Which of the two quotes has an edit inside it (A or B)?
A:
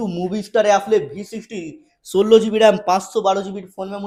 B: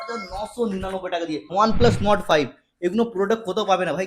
B